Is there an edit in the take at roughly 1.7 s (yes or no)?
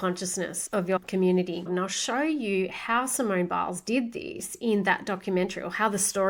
yes